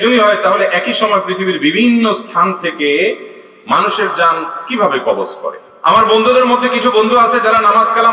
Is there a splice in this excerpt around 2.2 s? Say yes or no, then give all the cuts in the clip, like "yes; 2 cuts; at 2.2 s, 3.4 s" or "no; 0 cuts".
no; 1 cut; at 5.7 s